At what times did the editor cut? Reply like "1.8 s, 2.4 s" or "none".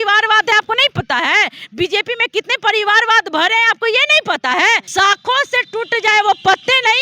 4.9 s